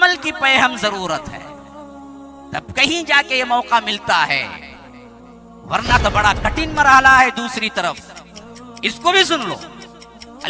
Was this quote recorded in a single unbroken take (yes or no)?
yes